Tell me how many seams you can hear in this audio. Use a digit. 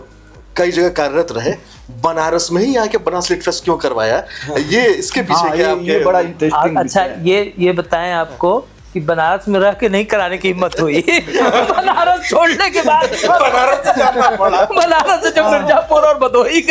0